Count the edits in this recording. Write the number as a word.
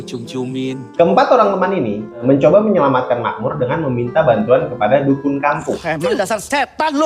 three